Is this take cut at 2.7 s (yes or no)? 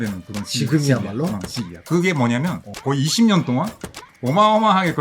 yes